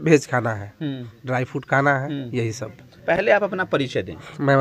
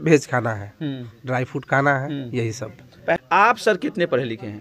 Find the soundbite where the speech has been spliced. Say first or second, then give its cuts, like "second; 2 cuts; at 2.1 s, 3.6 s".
second; 1 cut; at 3.2 s